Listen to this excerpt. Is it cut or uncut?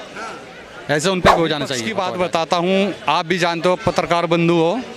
cut